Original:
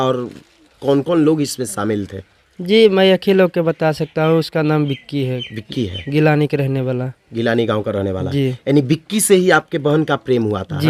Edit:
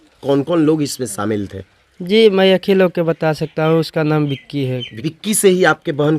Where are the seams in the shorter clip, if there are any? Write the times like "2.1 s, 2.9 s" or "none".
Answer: 5.1 s